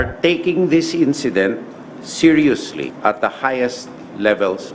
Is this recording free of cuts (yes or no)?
no